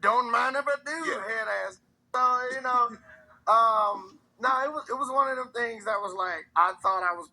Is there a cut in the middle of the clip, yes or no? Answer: yes